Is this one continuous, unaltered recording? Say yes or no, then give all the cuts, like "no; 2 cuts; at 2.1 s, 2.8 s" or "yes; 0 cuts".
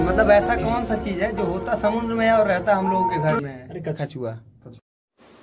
no; 1 cut; at 4.0 s